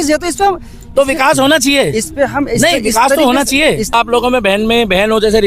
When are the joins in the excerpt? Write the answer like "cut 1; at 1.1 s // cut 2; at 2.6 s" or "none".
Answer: cut 1; at 3.9 s